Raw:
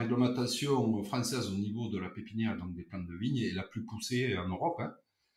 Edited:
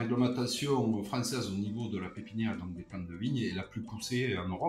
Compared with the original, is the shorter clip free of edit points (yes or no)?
yes